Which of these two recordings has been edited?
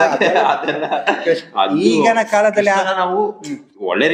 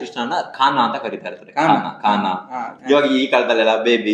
second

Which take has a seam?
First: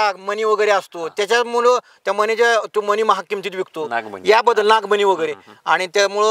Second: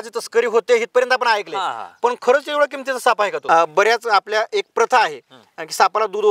second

